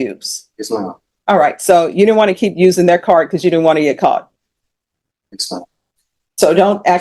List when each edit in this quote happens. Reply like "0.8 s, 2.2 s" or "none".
5.7 s